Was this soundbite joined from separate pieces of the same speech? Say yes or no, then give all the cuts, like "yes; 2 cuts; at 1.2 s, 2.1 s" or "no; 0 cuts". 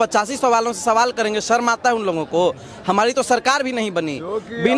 no; 0 cuts